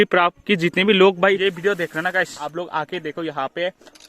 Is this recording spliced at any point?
yes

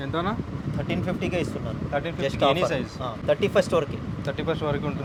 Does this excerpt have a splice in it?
no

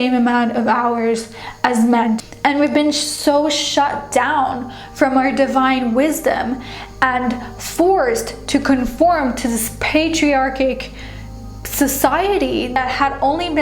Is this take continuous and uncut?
no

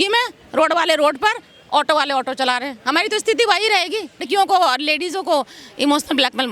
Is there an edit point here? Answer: yes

